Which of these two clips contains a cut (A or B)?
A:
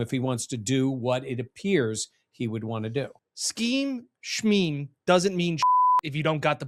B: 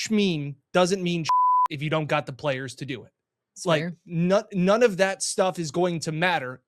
A